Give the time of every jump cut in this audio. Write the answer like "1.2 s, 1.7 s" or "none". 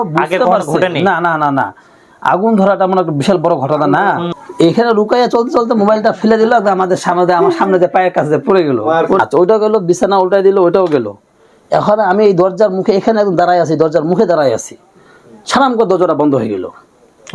4.2 s, 9.2 s